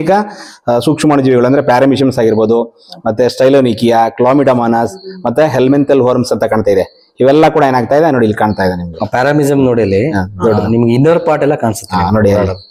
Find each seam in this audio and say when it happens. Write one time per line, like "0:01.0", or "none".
none